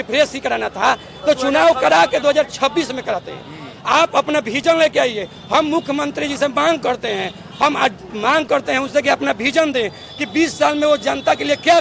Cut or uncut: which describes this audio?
uncut